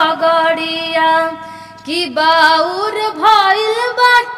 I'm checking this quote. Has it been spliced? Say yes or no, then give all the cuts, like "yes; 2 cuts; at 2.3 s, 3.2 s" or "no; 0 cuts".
no; 0 cuts